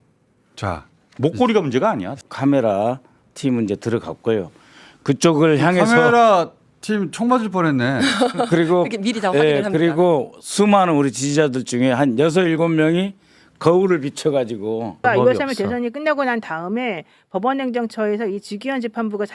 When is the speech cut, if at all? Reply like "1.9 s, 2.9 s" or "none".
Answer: 2.2 s, 15.0 s